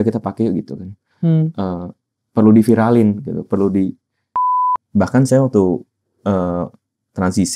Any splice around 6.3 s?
no; 1 cut; at 4.4 s

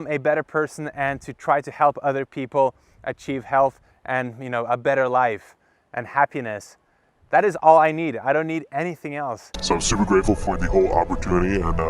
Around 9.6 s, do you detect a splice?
yes; 1 cut; at 9.6 s

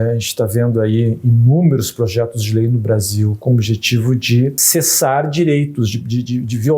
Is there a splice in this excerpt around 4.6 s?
yes; 2 cuts; at 3.4 s, 4.6 s

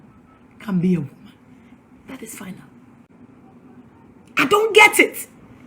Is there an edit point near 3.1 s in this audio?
yes; 1 cut; at 3.1 s

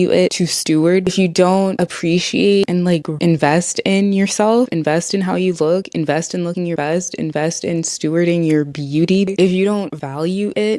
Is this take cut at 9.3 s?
yes; 3 cuts; at 1.1 s, 2.6 s, 9.3 s

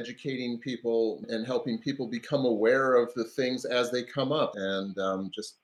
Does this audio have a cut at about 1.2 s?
yes; 2 cuts; at 1.2 s, 4.5 s

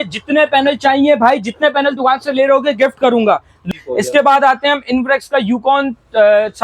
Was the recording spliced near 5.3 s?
no; 1 cut; at 3.7 s

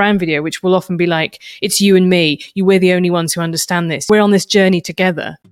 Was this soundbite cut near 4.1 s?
yes; 1 cut; at 4.1 s

